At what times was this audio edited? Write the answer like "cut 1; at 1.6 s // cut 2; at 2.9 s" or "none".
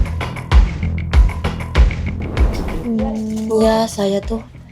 cut 1; at 2.7 s